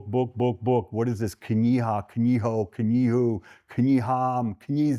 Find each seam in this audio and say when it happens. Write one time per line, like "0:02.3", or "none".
none